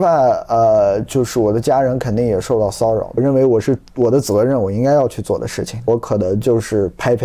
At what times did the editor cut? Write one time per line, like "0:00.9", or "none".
0:03.2
0:05.9